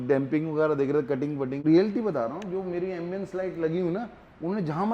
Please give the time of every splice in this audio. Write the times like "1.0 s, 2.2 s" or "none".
1.6 s